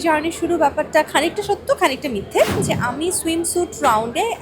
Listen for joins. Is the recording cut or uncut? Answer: cut